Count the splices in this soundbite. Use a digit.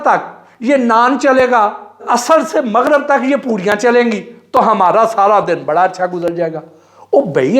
0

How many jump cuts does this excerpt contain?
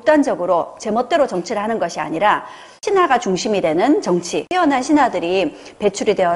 0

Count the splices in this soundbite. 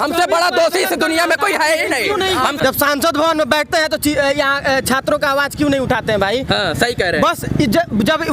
1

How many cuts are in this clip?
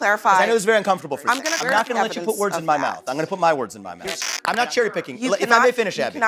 2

